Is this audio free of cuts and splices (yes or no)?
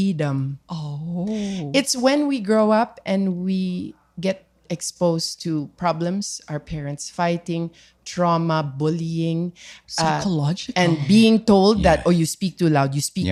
yes